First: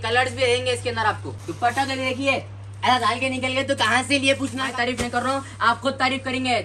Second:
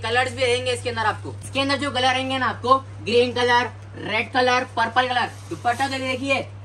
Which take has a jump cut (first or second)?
first